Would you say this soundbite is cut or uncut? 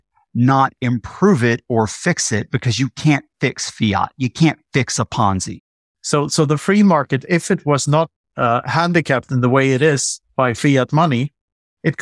cut